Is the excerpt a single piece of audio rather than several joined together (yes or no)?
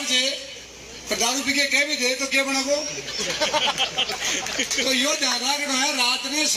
yes